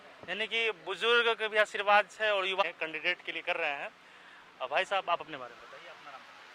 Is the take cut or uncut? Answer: uncut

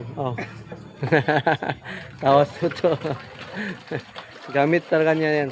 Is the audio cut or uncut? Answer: cut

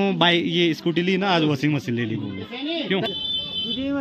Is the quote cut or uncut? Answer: cut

